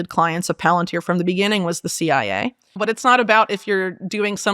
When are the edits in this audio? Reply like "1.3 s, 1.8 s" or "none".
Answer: 2.8 s